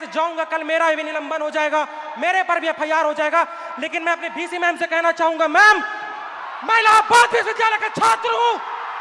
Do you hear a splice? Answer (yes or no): no